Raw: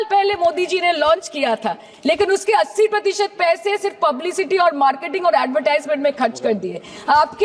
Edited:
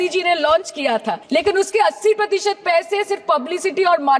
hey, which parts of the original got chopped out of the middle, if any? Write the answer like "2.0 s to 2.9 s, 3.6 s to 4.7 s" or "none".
1.7 s to 1.9 s